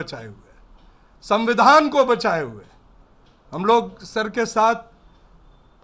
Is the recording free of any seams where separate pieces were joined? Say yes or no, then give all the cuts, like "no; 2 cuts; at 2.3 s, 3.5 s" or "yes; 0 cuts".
yes; 0 cuts